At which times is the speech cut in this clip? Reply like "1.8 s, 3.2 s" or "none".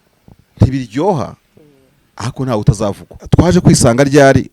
3.1 s